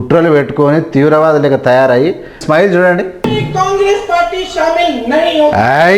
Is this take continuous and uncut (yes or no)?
no